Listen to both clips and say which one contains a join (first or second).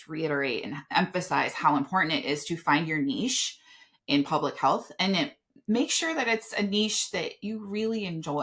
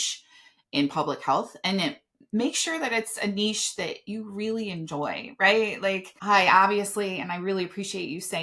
second